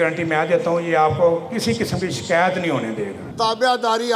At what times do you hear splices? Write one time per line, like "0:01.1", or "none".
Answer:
0:03.2